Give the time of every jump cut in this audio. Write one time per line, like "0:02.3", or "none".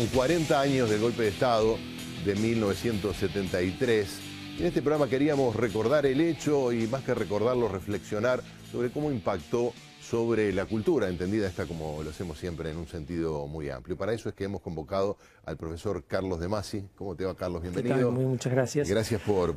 0:16.5